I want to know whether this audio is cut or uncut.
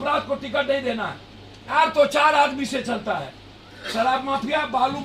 cut